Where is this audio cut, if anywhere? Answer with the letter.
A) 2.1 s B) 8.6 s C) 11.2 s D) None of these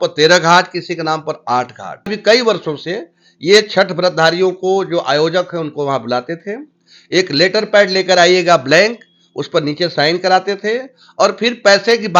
A